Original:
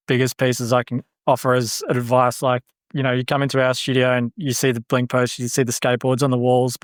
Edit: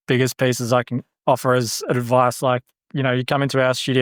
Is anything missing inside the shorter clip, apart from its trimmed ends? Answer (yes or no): no